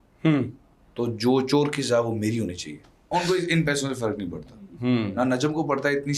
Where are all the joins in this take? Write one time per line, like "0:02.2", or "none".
0:03.1